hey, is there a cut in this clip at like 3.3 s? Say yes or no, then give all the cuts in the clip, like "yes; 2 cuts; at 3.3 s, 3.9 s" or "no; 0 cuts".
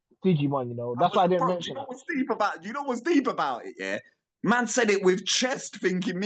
no; 0 cuts